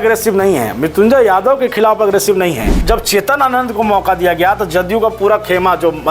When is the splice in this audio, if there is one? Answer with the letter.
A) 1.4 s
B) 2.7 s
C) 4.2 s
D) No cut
B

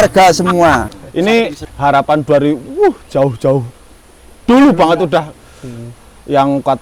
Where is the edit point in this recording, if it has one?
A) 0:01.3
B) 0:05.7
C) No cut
A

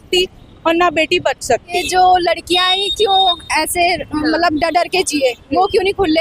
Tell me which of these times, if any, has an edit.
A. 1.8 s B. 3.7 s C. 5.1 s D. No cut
A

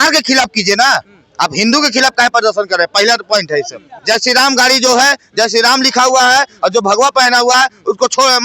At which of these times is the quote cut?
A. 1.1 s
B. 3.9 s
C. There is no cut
B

